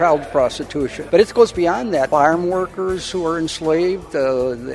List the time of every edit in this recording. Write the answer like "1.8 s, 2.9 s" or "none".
1.0 s, 2.1 s